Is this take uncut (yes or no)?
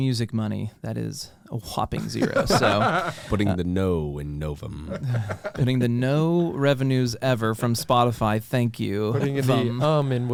yes